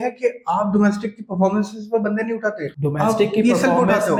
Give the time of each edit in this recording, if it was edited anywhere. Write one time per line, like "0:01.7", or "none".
none

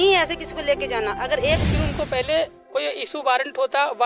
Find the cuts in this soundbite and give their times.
0:01.7

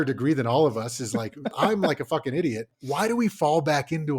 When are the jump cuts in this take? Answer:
0:01.6
0:02.7

